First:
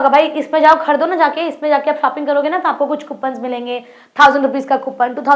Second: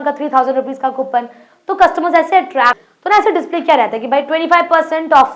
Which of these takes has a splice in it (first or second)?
second